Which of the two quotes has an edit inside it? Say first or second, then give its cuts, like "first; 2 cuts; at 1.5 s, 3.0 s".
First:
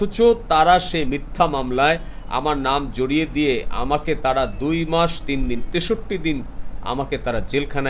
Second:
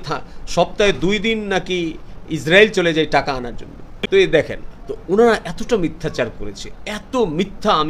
second; 1 cut; at 3.9 s